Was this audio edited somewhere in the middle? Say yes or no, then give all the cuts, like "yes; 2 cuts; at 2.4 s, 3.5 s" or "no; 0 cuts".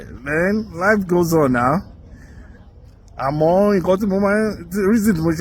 no; 0 cuts